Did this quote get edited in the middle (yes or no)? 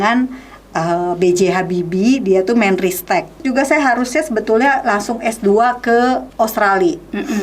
yes